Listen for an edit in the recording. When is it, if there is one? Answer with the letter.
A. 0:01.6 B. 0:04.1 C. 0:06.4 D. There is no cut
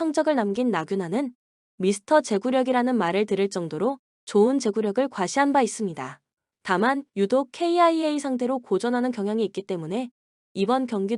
B